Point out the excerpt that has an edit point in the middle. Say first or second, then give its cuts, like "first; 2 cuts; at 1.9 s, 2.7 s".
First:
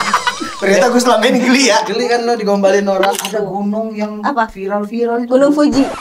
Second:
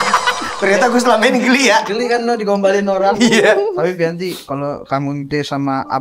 first; 1 cut; at 3.1 s